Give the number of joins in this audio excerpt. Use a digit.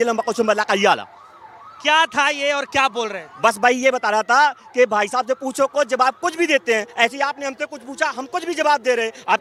0